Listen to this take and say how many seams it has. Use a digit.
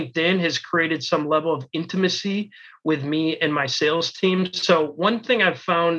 0